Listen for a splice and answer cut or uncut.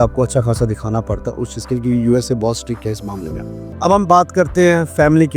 cut